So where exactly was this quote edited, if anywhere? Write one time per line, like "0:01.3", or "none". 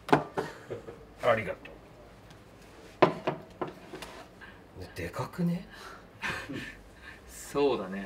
none